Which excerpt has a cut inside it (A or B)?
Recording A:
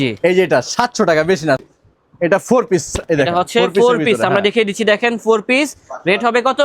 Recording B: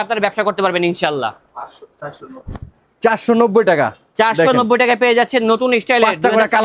A